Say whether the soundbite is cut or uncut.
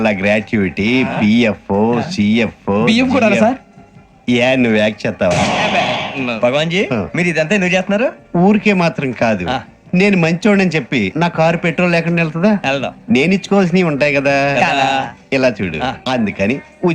uncut